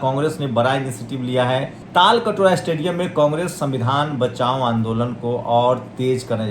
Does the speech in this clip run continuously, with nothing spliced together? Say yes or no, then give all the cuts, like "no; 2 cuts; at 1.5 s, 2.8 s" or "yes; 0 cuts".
no; 1 cut; at 1.8 s